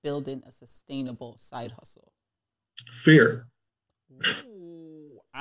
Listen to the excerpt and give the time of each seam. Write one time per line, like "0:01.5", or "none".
none